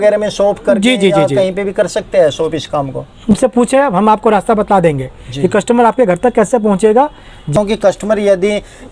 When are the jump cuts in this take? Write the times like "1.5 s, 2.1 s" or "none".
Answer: 3.3 s, 7.5 s